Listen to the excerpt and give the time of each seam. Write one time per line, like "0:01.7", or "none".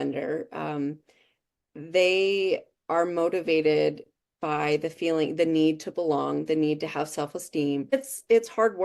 0:07.9

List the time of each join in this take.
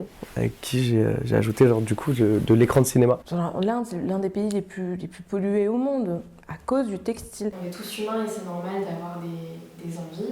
0:03.3
0:07.5

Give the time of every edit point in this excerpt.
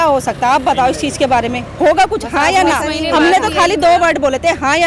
none

